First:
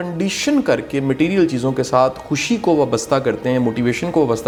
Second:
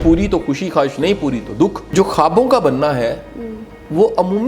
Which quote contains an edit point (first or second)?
second